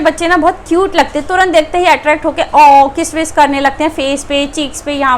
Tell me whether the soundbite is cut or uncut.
uncut